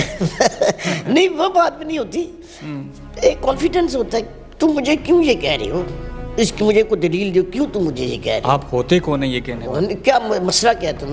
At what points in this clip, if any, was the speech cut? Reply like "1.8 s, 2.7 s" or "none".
none